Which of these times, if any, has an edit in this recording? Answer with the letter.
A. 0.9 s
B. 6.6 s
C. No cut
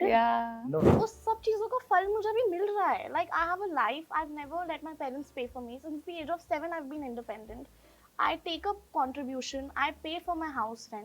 A